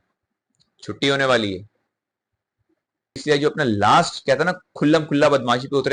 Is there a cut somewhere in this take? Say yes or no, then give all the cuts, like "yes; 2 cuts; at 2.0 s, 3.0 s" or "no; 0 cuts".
yes; 1 cut; at 3.2 s